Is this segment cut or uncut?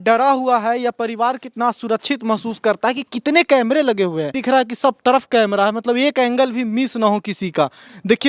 cut